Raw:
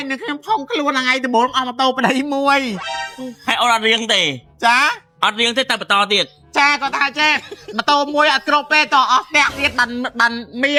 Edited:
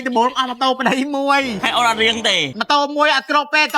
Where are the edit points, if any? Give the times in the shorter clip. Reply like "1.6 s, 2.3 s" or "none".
1.6 s, 2.5 s